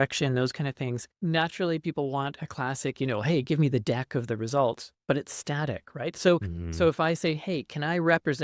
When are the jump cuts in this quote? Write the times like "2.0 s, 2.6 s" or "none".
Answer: 1.1 s